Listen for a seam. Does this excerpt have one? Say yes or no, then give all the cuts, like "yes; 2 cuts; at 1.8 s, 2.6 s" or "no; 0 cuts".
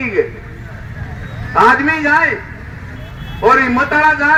no; 0 cuts